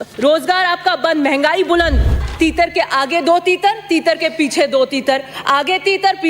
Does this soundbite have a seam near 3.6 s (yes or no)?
no